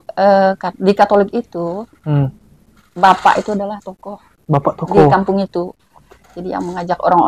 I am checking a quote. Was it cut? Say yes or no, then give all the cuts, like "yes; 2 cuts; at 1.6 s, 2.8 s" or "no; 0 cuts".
no; 0 cuts